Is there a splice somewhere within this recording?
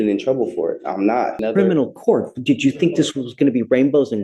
yes; 1 cut; at 1.4 s

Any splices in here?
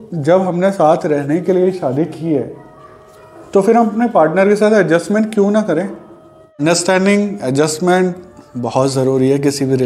yes; 1 cut; at 6.6 s

